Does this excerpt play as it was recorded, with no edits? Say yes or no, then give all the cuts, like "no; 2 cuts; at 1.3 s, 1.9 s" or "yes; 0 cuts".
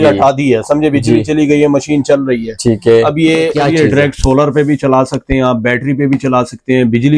no; 1 cut; at 3.6 s